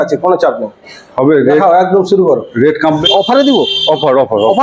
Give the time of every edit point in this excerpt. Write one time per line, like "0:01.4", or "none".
0:03.0